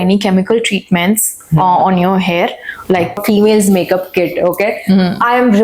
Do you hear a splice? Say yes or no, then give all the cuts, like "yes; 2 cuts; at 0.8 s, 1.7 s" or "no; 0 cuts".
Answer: yes; 1 cut; at 3.2 s